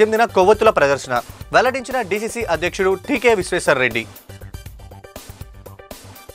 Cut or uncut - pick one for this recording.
uncut